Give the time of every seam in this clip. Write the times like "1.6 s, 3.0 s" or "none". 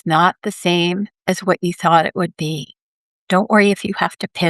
1.1 s